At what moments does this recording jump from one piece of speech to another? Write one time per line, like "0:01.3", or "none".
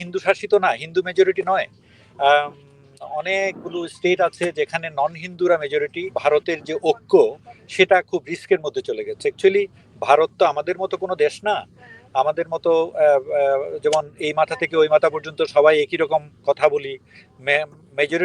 0:06.1